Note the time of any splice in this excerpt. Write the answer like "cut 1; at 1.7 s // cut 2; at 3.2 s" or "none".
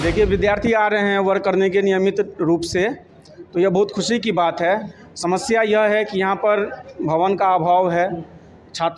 none

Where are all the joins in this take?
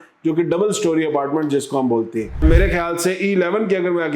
cut 1; at 2.4 s

